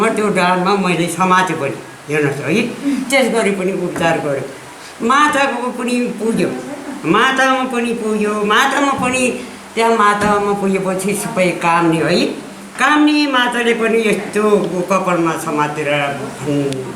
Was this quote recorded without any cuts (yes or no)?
yes